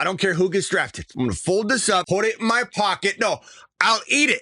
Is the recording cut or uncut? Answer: cut